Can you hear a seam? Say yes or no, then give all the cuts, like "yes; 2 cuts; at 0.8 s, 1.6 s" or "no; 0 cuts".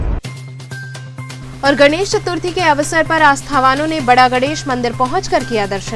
yes; 1 cut; at 1.4 s